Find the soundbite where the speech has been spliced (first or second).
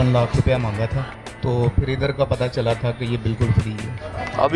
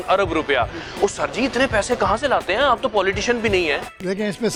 first